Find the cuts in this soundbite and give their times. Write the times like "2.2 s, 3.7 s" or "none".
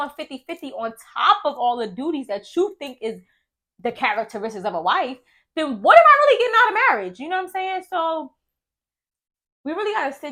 none